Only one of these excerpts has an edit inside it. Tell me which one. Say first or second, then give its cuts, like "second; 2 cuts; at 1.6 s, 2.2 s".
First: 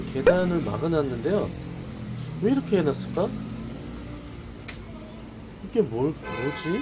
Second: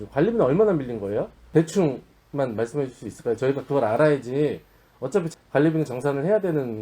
second; 2 cuts; at 1.4 s, 5.3 s